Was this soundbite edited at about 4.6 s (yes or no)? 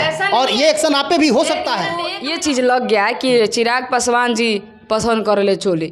no